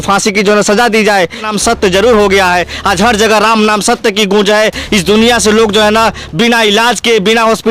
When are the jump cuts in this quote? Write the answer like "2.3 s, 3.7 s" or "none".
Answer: 1.5 s